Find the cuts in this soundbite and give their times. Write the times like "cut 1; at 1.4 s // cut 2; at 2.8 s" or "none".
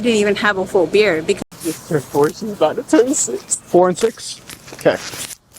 cut 1; at 1.4 s

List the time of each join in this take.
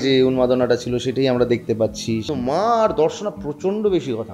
cut 1; at 2.3 s

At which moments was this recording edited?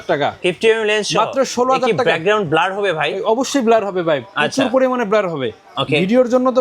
none

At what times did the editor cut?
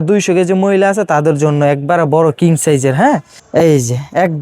cut 1; at 3.4 s

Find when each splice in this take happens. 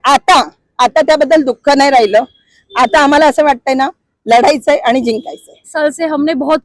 cut 1; at 5.7 s

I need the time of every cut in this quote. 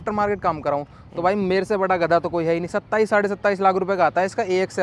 none

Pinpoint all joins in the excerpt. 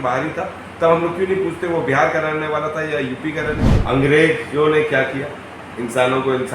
cut 1; at 3.6 s

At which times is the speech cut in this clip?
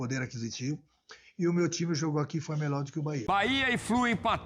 cut 1; at 3.2 s

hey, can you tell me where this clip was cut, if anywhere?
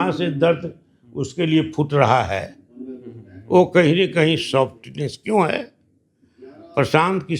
none

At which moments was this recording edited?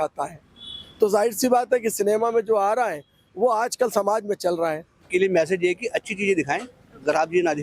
cut 1; at 5.0 s

